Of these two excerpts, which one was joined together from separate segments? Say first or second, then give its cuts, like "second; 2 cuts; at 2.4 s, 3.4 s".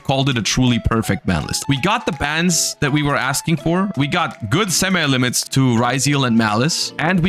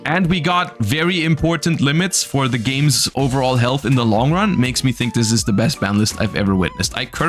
first; 2 cuts; at 1.5 s, 3.9 s